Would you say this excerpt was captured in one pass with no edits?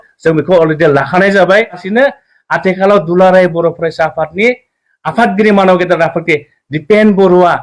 no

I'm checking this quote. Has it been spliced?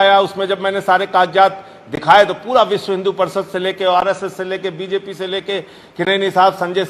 no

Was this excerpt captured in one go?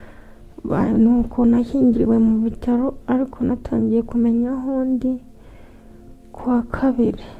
yes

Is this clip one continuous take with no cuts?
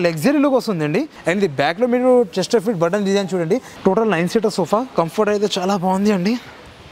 no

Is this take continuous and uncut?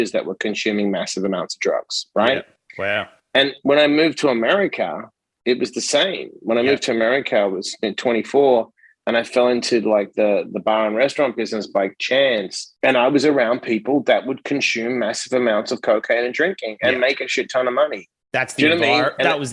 no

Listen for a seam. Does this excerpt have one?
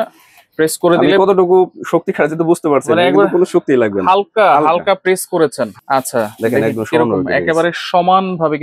yes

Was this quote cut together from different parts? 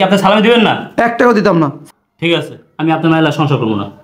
yes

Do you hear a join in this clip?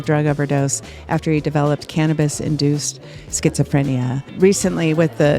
yes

